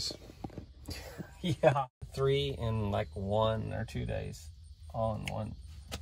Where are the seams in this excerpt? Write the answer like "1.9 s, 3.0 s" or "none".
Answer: 2.0 s

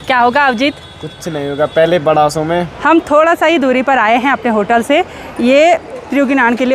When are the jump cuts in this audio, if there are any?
2.7 s

